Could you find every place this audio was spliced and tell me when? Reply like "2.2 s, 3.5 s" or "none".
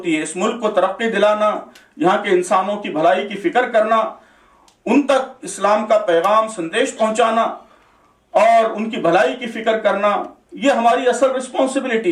none

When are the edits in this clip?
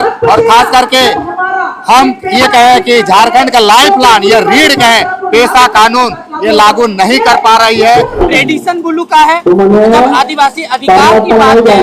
8.2 s

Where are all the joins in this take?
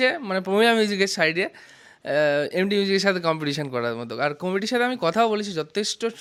none

